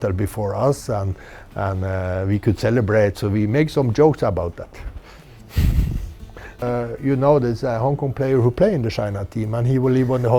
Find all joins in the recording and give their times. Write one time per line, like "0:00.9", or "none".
none